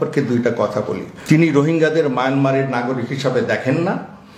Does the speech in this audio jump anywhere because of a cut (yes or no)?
yes